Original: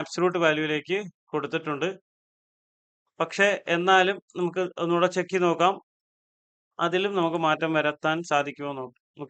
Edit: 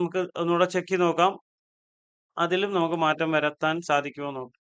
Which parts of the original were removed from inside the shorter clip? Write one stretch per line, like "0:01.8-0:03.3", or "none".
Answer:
none